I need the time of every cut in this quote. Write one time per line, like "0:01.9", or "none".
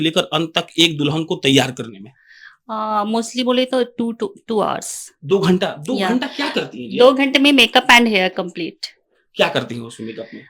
none

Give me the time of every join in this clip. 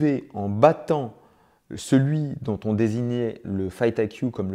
none

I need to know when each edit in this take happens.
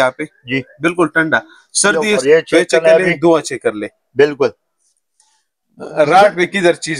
0:02.2

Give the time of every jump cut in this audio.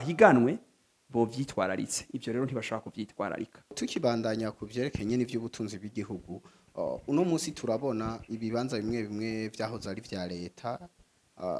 0:03.8

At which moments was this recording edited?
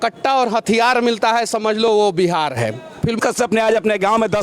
0:03.2

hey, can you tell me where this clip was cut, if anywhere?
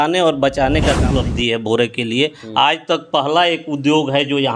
0:01.2

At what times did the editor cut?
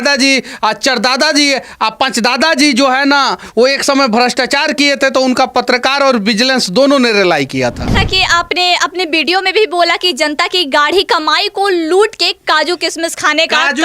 0:07.9

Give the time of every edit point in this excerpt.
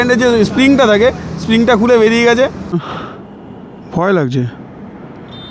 0:02.8

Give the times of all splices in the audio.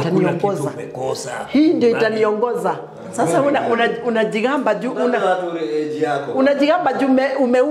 0:03.0

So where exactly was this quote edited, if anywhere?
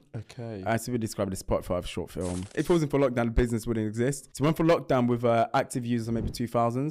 0:02.5
0:04.3

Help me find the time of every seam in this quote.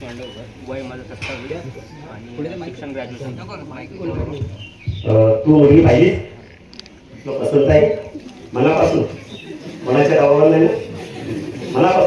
none

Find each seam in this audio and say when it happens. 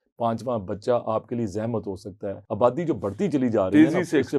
0:02.4

